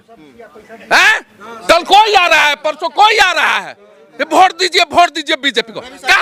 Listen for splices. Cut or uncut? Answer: uncut